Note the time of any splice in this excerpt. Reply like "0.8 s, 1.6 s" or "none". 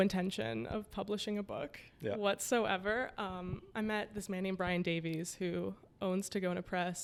none